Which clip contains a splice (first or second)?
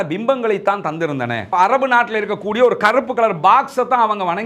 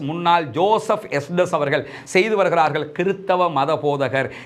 first